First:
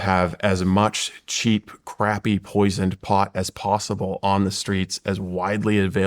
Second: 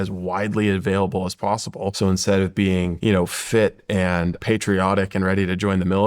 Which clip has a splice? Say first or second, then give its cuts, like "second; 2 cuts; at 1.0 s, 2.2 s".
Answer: second; 3 cuts; at 1.9 s, 2.9 s, 4.4 s